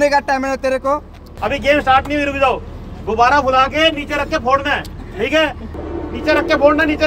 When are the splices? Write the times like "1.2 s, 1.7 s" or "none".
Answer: 1.2 s, 5.7 s